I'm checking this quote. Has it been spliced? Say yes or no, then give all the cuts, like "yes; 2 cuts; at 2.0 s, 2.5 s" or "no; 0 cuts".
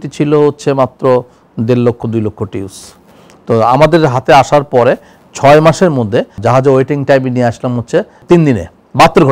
yes; 2 cuts; at 6.4 s, 8.1 s